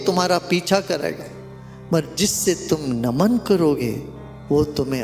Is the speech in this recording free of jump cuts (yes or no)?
yes